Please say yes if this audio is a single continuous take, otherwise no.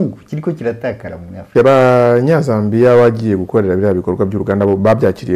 no